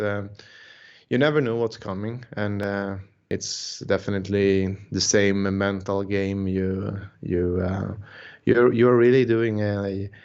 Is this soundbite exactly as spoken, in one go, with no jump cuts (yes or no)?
no